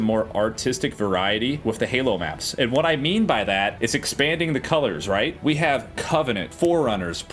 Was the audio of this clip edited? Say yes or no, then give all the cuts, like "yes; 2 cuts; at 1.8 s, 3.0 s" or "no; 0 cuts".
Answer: no; 0 cuts